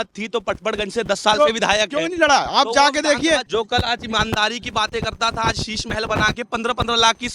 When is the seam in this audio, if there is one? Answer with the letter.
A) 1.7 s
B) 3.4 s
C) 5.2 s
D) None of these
B